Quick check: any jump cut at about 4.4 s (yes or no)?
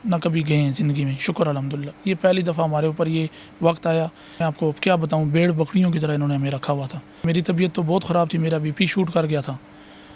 yes